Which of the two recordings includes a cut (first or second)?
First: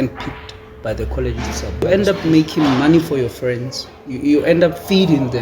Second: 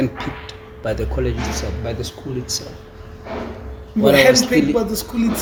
first